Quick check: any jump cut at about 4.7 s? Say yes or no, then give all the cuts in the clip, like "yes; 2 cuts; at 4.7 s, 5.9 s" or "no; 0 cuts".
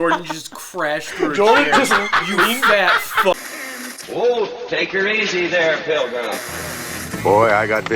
no; 1 cut; at 3.3 s